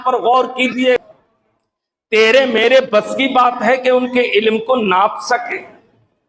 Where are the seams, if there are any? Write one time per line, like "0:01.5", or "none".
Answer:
0:01.0